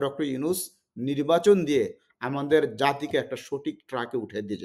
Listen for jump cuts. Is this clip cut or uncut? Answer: uncut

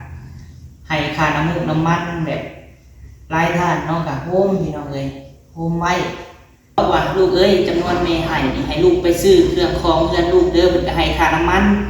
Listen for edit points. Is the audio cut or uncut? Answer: cut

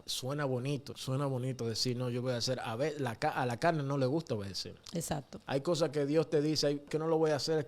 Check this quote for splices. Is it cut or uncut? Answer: cut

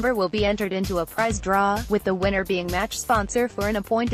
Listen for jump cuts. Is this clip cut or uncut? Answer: uncut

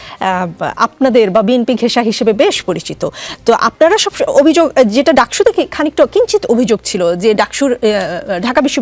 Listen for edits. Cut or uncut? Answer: uncut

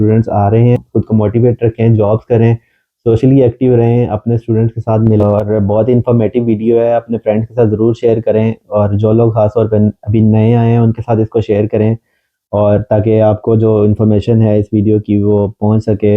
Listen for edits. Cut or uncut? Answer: cut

